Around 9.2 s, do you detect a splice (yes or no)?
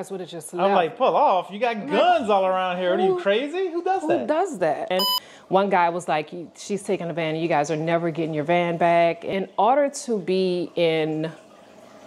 yes